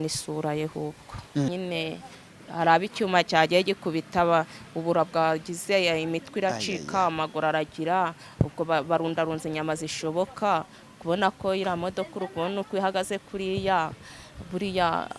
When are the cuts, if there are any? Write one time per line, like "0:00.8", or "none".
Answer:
0:01.5